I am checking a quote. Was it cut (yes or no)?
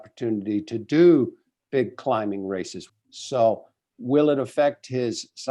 yes